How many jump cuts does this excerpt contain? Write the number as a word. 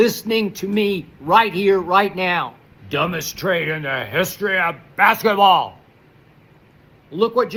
zero